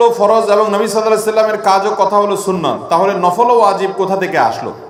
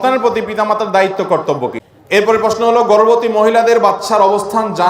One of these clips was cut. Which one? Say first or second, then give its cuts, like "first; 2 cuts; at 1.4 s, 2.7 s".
second; 1 cut; at 1.8 s